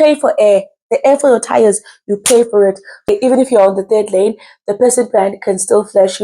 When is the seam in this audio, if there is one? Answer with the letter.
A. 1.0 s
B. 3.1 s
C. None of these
B